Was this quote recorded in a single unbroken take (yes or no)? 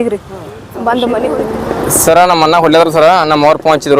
no